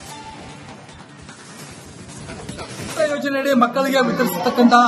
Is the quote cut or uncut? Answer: uncut